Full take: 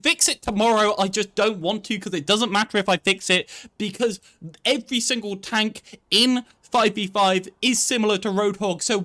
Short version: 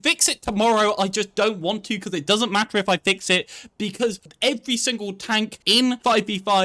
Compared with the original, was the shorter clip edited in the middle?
yes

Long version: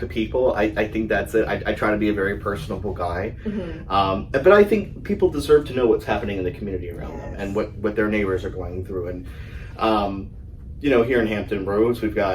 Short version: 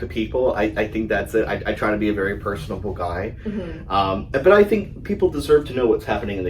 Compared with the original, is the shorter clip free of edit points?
yes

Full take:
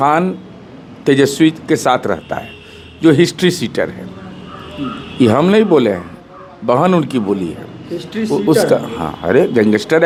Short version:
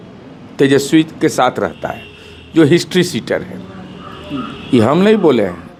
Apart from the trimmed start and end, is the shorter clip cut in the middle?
no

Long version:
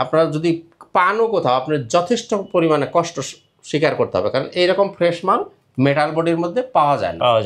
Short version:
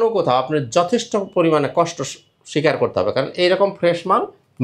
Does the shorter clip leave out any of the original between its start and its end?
no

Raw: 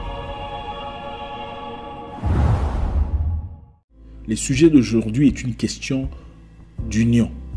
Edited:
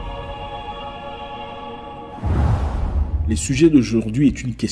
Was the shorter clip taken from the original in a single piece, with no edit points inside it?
no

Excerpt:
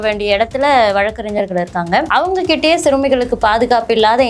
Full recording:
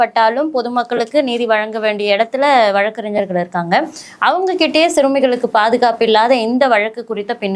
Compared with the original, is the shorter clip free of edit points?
no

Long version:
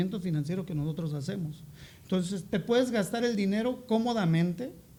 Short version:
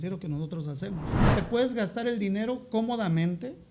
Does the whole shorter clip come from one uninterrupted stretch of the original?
no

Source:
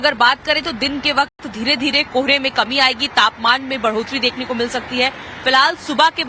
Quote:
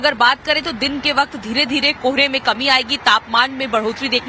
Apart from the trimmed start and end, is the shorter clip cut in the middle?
yes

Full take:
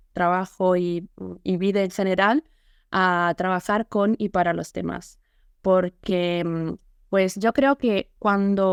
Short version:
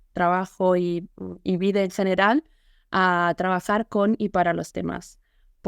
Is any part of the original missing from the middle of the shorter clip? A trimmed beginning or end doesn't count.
no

